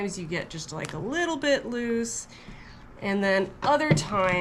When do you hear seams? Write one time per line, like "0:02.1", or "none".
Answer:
none